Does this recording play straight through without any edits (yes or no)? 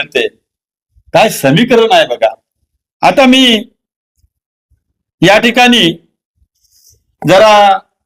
yes